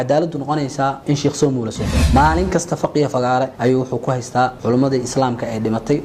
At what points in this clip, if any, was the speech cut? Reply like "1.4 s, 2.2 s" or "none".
1.0 s, 2.0 s, 3.5 s, 4.6 s